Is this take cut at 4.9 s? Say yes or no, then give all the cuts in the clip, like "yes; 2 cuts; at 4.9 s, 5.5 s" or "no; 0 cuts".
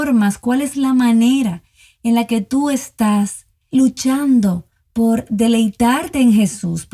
no; 1 cut; at 3.7 s